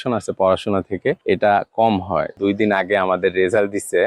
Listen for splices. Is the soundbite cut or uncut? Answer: cut